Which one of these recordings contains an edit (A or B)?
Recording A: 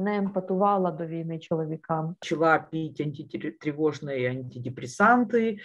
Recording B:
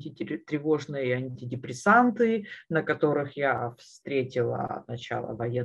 A